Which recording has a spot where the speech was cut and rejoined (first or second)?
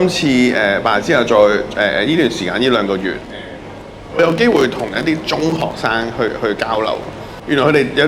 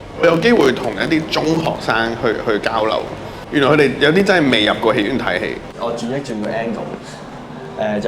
second